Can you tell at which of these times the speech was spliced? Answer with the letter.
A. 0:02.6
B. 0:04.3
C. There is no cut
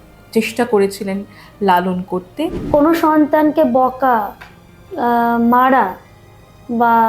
A